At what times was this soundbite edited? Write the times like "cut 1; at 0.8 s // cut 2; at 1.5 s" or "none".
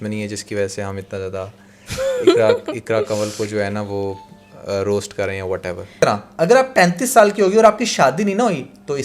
cut 1; at 5.9 s